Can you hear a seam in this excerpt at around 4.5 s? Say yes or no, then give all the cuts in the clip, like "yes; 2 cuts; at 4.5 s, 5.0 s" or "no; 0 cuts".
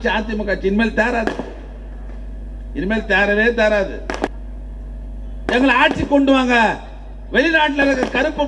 yes; 1 cut; at 4.5 s